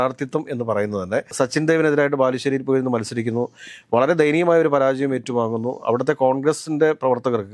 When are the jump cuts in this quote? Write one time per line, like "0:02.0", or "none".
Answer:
none